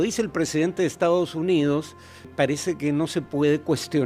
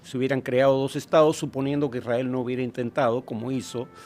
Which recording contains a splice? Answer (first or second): first